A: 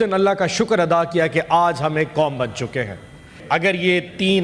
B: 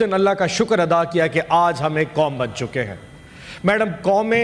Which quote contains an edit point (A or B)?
A